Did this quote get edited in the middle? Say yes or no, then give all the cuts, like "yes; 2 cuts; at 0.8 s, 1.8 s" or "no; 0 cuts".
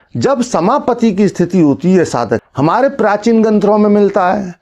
yes; 1 cut; at 2.4 s